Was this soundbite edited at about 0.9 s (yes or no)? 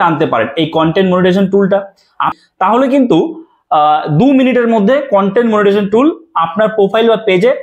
no